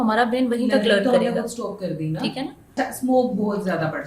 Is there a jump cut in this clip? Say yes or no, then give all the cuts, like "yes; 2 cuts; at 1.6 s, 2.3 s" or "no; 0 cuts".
yes; 1 cut; at 2.7 s